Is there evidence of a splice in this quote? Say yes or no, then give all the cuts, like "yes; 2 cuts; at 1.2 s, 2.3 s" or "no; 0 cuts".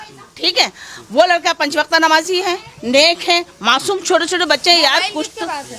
no; 0 cuts